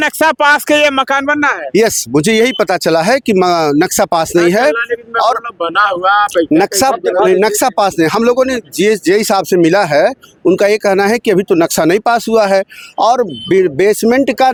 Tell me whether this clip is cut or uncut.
uncut